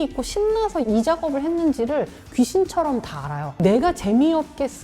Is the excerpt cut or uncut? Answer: cut